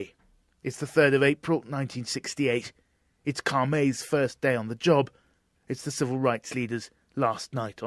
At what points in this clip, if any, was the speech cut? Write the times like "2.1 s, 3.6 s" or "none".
none